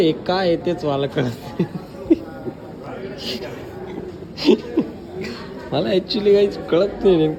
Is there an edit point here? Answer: no; 0 cuts

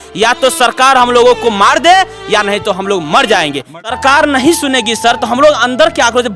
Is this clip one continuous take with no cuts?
no; 1 cut; at 4.0 s

